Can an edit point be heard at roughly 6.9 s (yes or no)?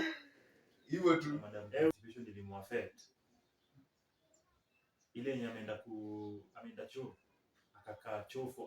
no